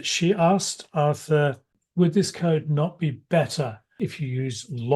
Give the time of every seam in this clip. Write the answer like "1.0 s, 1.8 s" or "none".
1.8 s, 3.9 s